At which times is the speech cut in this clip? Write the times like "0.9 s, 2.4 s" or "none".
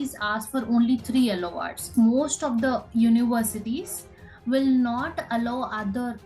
1.8 s